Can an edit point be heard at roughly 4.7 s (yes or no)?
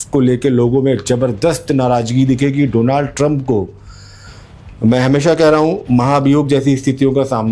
no